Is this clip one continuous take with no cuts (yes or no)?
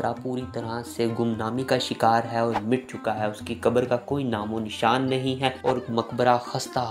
no